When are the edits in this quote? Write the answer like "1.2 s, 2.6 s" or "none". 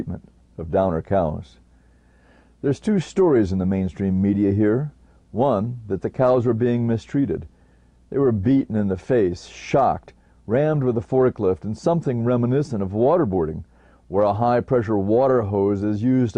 none